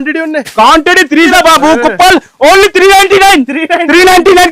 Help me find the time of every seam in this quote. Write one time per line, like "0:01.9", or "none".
0:01.3